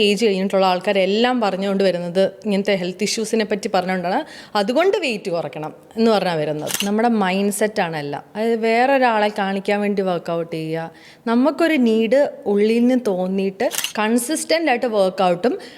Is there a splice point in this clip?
yes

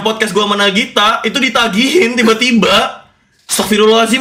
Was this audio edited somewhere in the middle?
no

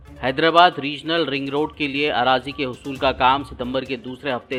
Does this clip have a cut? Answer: no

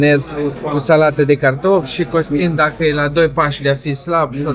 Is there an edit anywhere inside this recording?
no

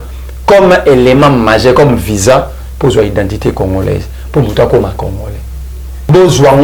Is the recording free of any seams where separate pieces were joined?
yes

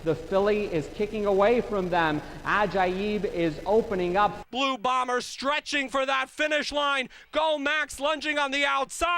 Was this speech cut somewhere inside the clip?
yes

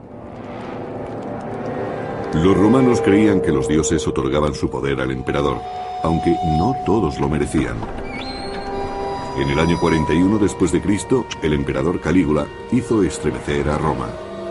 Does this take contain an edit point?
no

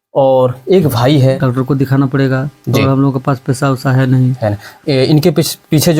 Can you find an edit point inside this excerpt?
yes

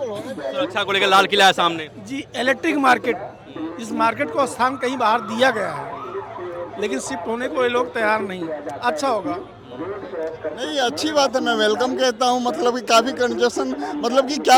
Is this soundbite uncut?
yes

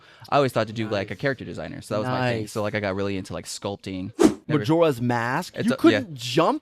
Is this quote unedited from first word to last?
no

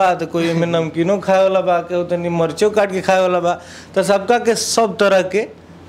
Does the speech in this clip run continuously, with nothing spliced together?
yes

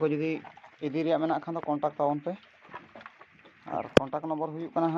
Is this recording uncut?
yes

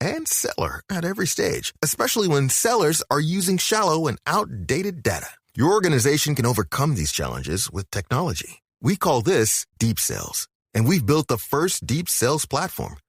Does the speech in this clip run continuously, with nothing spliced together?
yes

